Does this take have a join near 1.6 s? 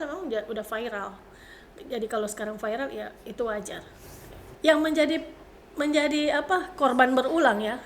no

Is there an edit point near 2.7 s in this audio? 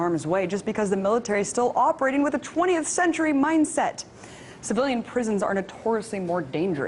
yes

